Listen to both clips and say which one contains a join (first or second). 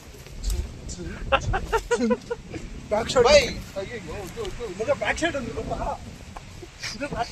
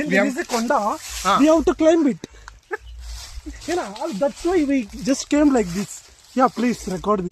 first